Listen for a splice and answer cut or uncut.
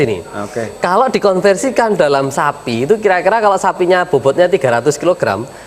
uncut